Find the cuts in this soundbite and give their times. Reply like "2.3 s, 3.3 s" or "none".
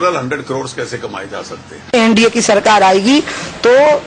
1.9 s